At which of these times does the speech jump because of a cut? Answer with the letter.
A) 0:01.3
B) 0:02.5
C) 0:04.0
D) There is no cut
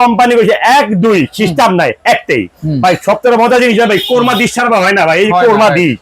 B